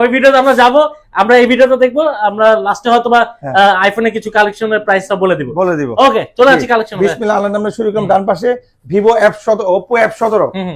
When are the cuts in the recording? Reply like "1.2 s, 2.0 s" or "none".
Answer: none